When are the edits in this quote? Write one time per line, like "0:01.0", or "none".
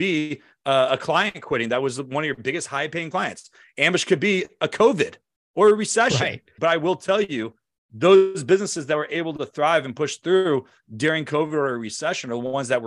0:06.4